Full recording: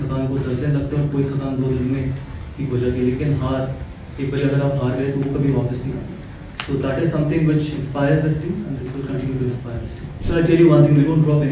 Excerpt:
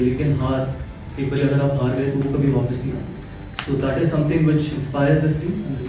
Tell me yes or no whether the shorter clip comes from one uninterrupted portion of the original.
yes